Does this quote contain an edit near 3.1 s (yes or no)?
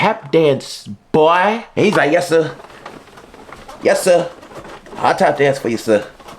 no